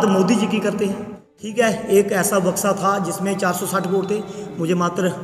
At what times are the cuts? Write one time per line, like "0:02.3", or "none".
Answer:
0:01.4